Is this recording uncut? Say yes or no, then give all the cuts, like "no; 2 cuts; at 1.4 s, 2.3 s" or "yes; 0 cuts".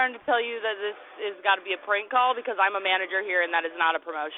yes; 0 cuts